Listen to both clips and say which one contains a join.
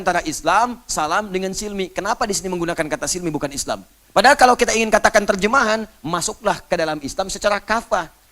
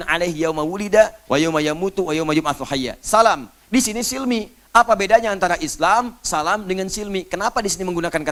first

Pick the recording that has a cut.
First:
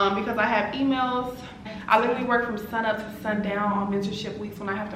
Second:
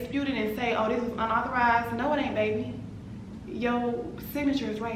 first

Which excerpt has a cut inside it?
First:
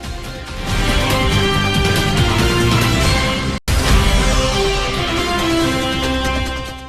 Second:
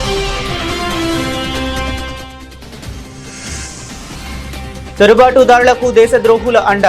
second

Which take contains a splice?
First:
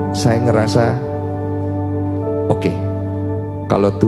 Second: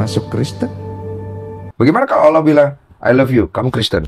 second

